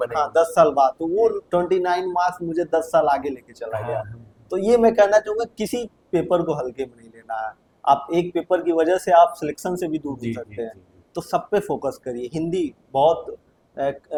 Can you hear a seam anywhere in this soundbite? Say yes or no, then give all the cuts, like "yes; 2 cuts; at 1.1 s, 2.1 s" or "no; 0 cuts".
no; 0 cuts